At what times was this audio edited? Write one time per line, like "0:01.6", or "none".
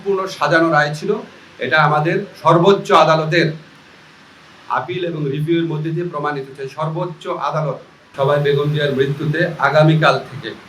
0:08.0